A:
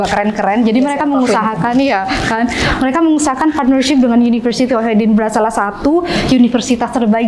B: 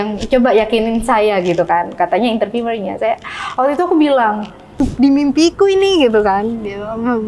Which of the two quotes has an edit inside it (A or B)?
B